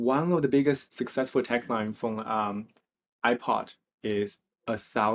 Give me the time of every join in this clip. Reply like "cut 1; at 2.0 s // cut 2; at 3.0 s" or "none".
cut 1; at 0.9 s